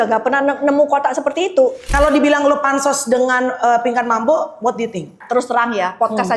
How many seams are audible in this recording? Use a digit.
2